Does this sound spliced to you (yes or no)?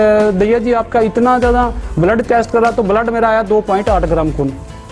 no